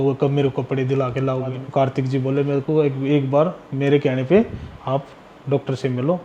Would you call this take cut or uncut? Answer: cut